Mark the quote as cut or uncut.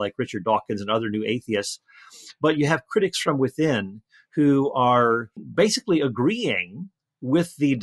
cut